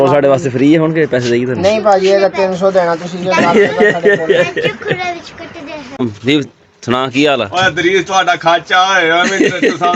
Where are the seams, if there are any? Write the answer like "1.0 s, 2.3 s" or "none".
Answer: none